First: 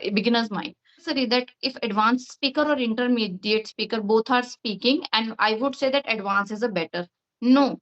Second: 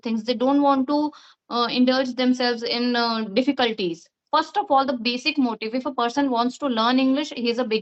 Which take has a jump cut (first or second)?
first